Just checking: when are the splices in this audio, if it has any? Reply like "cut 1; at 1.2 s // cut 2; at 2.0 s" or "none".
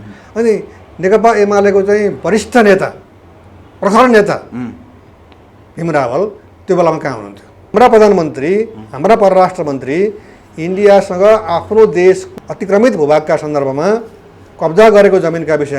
cut 1; at 7.6 s // cut 2; at 12.3 s